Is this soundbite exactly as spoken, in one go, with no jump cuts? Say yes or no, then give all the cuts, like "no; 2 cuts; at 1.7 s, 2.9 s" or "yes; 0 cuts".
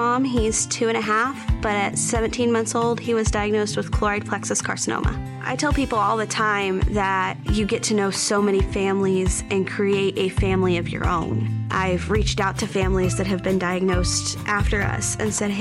yes; 0 cuts